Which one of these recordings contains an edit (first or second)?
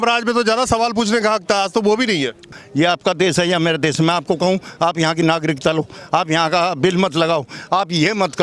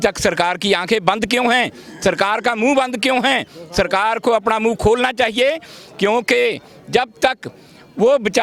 first